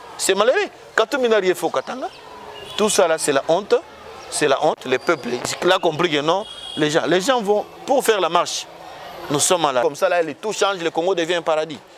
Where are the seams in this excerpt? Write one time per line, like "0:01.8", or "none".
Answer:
0:09.8